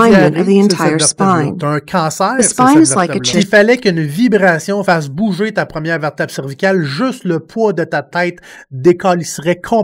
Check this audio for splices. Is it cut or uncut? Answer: cut